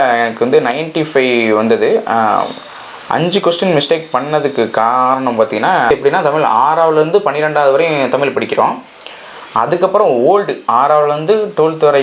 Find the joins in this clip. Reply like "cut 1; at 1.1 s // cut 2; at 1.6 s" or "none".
cut 1; at 5.9 s